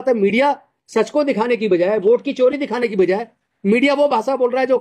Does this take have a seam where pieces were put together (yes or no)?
no